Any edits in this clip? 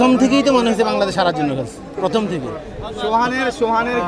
no; 0 cuts

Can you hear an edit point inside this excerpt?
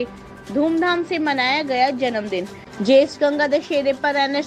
yes; 1 cut; at 2.6 s

